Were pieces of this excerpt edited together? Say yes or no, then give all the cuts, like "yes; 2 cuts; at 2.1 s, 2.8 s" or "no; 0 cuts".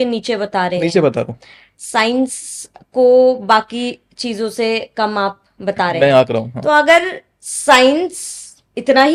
no; 0 cuts